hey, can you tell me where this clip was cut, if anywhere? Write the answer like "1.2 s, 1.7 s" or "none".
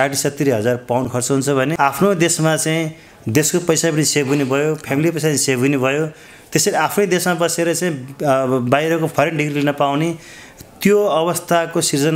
1.2 s